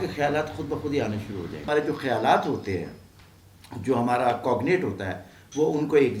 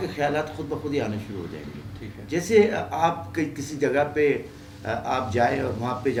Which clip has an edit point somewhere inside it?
first; 1 cut; at 1.7 s

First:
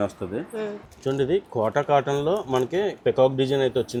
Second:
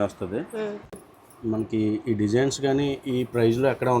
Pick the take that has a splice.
second; 1 cut; at 1.0 s

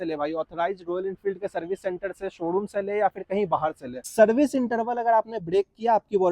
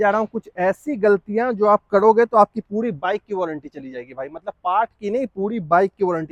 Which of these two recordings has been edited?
first; 1 cut; at 3.9 s

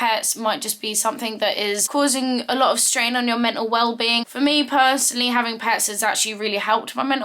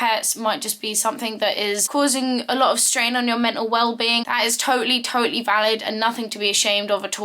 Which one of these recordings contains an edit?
first; 1 cut; at 4.3 s

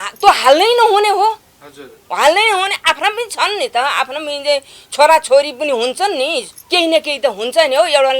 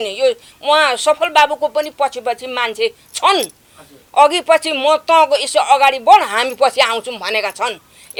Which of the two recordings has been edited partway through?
first; 1 cut; at 6.6 s

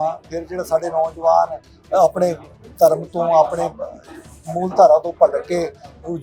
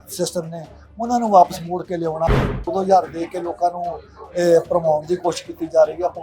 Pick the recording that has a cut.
second; 1 cut; at 2.6 s

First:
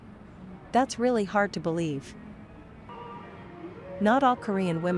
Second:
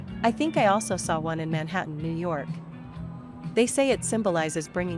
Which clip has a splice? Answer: first; 1 cut; at 2.9 s

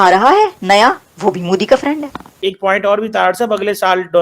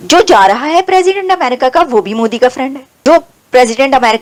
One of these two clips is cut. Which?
first; 1 cut; at 2.3 s

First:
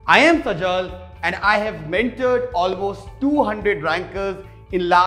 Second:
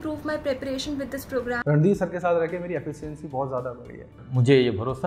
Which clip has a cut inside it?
second; 1 cut; at 1.6 s

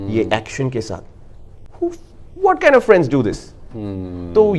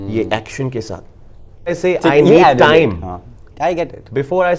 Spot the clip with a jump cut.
second; 1 cut; at 1.7 s

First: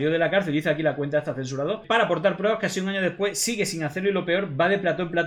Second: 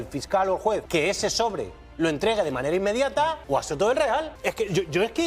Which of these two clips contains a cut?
second; 3 cuts; at 0.8 s, 3.4 s, 4.3 s

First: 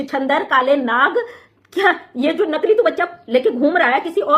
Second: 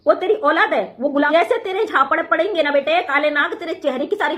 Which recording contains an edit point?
second; 1 cut; at 1.3 s

